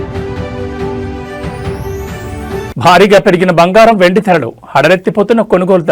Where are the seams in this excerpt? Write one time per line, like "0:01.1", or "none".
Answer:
none